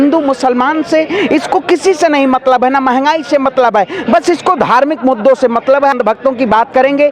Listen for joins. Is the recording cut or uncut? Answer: cut